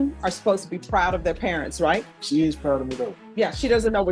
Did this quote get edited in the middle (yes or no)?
yes